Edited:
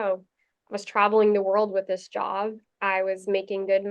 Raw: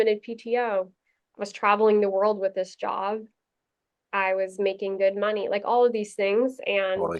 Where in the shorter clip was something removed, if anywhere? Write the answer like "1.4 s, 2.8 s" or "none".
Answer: 2.7 s